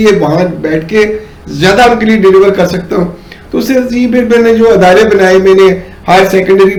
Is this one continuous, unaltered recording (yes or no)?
yes